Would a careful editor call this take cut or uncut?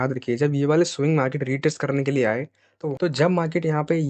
cut